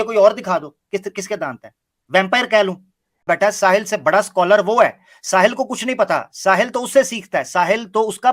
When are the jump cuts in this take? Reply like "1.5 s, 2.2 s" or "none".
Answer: 3.2 s